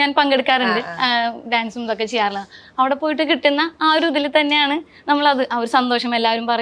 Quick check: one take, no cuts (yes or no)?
yes